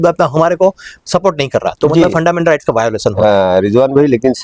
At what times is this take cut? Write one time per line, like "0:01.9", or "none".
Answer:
none